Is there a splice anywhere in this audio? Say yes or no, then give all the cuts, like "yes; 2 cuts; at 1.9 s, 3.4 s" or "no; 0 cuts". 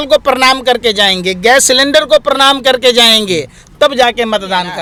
no; 0 cuts